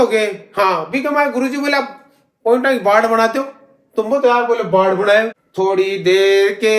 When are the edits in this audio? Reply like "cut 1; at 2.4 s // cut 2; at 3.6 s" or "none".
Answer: cut 1; at 5.4 s